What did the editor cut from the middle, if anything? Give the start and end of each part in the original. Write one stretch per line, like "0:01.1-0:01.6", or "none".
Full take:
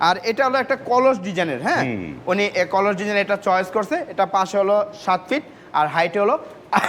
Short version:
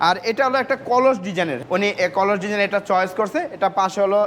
0:01.6-0:02.1